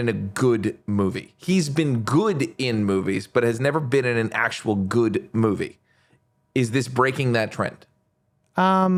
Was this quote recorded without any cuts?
yes; 0 cuts

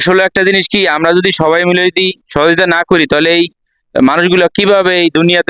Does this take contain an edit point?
no; 0 cuts

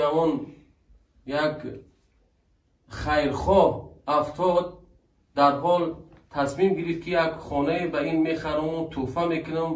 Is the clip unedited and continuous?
yes; 0 cuts

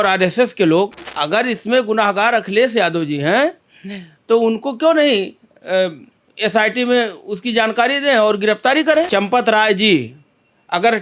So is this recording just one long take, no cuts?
no; 2 cuts; at 1.1 s, 9.1 s

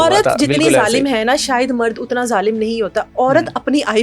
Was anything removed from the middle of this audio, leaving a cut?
no; 0 cuts

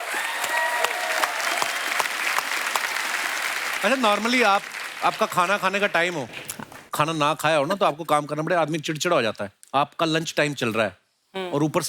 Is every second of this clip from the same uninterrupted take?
no; 1 cut; at 3.8 s

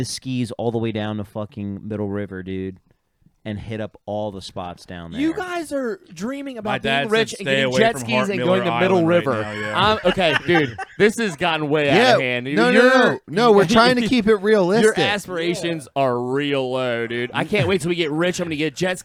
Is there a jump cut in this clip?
no; 0 cuts

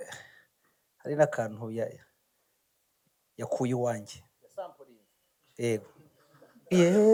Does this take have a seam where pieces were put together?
no; 0 cuts

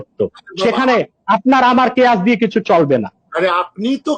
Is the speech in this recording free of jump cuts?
yes; 0 cuts

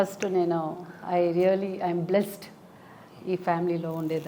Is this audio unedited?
yes; 0 cuts

